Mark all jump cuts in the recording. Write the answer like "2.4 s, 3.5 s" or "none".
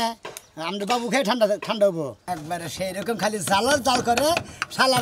2.2 s